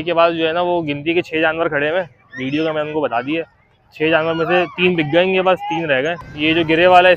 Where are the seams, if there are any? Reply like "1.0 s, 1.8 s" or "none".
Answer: 6.3 s